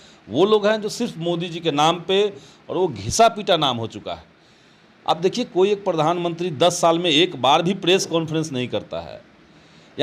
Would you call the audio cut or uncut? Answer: uncut